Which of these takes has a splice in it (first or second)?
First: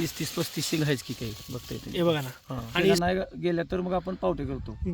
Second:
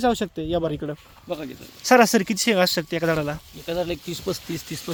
first